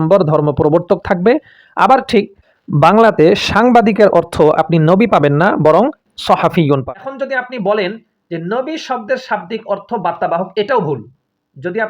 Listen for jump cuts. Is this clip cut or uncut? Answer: cut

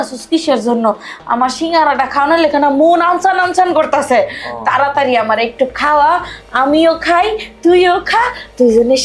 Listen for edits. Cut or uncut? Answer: uncut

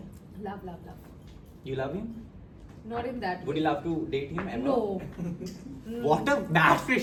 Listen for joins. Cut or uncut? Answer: uncut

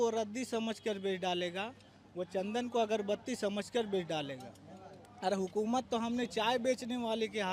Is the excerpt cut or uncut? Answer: uncut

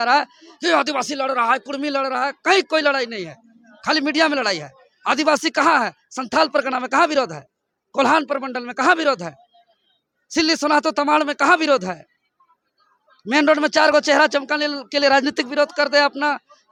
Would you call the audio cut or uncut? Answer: uncut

